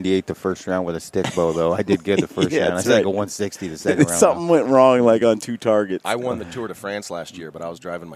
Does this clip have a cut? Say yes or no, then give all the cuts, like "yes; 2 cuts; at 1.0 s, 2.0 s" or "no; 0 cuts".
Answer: no; 0 cuts